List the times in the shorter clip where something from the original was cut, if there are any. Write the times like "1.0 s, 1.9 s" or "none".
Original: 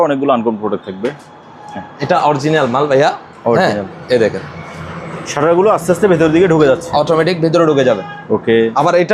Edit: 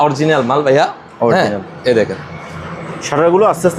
none